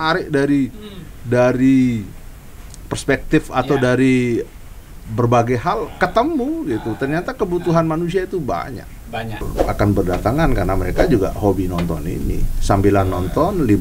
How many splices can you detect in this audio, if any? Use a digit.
1